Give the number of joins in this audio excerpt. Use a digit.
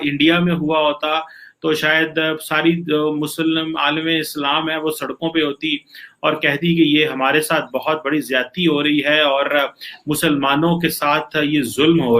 0